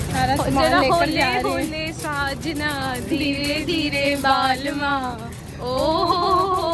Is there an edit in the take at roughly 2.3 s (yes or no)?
no